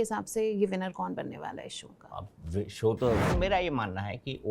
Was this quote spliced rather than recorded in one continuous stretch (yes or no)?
yes